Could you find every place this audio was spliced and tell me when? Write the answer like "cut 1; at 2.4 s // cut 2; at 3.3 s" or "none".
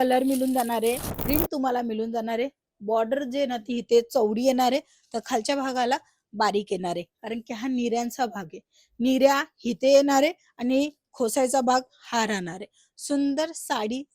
cut 1; at 1.1 s